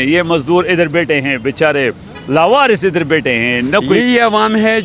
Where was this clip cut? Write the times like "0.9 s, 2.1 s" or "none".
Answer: 3.9 s